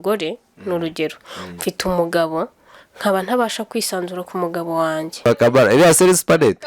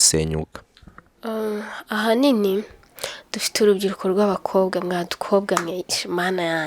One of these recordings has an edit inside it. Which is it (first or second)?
first